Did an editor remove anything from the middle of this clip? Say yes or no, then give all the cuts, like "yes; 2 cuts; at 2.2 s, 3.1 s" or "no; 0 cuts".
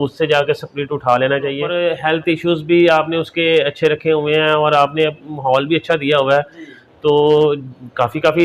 yes; 1 cut; at 1.9 s